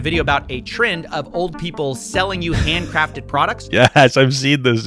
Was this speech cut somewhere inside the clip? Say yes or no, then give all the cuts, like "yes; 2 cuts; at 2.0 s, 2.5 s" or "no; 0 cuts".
no; 0 cuts